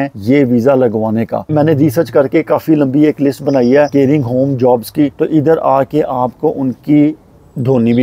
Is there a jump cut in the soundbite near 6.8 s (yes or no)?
no